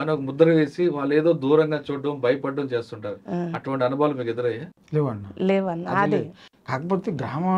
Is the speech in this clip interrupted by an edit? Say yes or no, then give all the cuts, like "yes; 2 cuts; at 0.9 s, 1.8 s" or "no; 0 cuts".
no; 0 cuts